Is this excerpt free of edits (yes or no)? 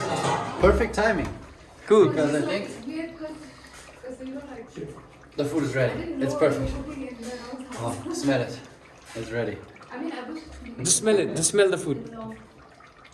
yes